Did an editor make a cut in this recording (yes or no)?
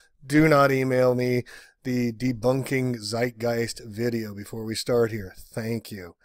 no